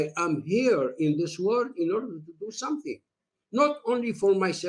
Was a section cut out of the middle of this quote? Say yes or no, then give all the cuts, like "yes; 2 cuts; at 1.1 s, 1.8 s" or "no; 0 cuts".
no; 0 cuts